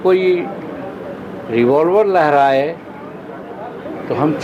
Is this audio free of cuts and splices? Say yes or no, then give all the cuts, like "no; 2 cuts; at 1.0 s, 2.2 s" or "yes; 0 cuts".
yes; 0 cuts